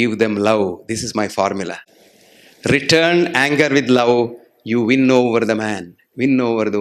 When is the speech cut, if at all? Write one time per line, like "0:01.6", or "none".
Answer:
none